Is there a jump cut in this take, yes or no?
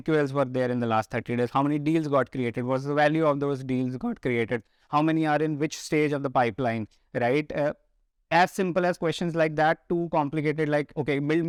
no